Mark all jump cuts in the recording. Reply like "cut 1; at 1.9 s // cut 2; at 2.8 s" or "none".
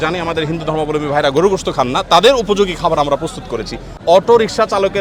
cut 1; at 4.0 s